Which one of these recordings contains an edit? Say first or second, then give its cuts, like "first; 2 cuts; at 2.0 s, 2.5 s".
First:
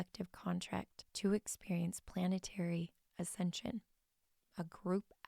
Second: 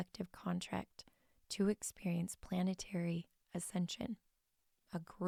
first; 1 cut; at 1.0 s